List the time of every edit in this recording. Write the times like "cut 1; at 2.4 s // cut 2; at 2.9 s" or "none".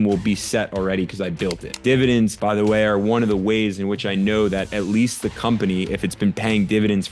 cut 1; at 1.8 s